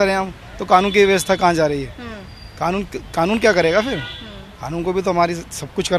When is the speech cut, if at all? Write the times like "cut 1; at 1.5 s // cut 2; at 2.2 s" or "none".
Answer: none